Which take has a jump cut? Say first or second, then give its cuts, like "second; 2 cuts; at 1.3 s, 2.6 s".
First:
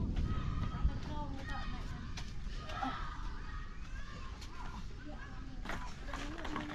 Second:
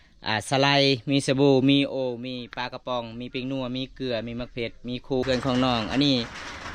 second; 1 cut; at 5.2 s